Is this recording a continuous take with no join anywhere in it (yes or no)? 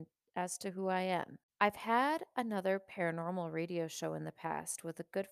no